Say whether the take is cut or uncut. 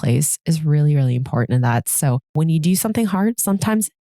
cut